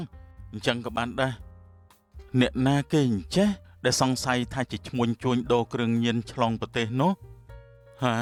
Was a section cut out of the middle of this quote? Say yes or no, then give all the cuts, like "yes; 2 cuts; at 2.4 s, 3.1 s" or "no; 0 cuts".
no; 0 cuts